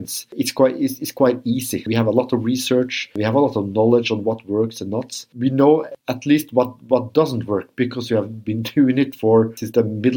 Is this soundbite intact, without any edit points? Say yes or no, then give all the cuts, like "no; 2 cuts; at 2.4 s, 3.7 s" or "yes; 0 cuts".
yes; 0 cuts